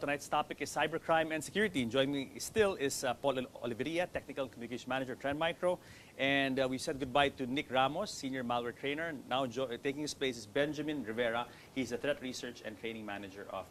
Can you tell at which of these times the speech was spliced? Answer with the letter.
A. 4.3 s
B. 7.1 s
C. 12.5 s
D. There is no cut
D